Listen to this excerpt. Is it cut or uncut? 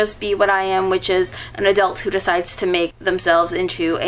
cut